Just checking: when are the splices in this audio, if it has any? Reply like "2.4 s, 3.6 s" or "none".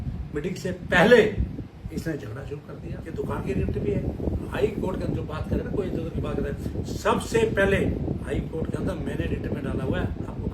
3.0 s